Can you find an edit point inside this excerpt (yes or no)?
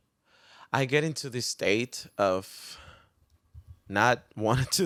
no